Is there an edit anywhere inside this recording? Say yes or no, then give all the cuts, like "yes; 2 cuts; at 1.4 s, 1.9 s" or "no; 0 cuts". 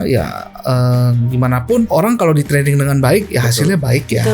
yes; 1 cut; at 1.9 s